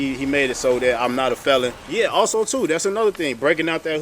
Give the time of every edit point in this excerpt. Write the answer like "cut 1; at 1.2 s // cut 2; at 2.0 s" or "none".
cut 1; at 1.8 s